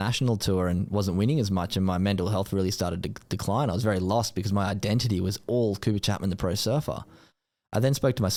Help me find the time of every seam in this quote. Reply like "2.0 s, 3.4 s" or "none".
none